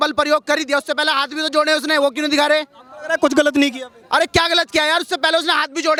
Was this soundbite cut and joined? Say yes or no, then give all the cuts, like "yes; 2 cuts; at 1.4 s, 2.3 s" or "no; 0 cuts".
no; 0 cuts